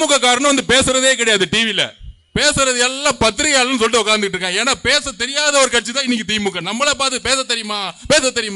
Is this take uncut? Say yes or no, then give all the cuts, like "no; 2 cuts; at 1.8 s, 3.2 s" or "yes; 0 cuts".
yes; 0 cuts